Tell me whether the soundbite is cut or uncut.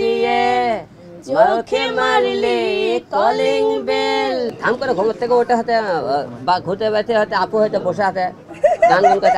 cut